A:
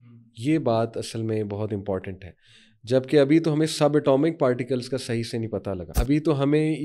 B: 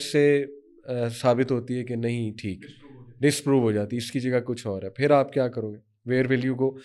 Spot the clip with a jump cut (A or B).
A